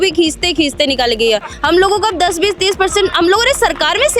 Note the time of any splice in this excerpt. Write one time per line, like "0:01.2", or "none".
0:01.5